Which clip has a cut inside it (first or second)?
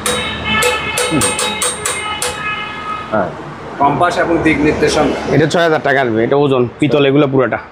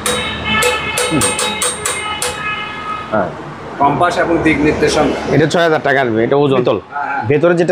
second